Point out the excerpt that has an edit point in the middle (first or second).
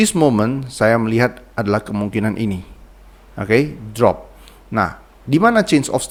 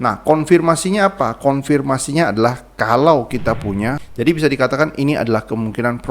second